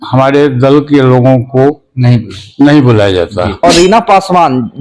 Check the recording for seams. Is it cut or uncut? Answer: cut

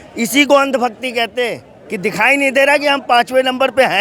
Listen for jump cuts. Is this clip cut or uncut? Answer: uncut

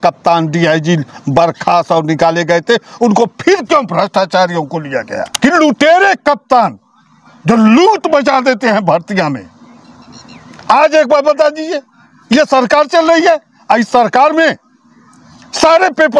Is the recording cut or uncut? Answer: cut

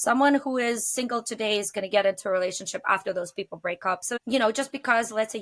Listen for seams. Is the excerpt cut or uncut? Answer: cut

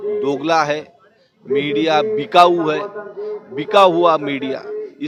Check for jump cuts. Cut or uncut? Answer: uncut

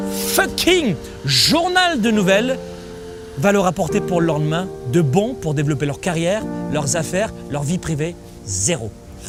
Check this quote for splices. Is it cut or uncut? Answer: uncut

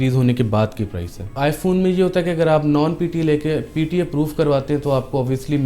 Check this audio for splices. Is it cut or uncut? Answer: cut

